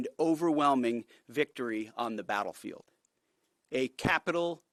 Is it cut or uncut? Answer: uncut